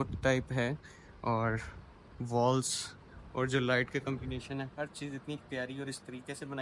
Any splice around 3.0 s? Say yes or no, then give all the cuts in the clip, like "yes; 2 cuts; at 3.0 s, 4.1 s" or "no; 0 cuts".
no; 0 cuts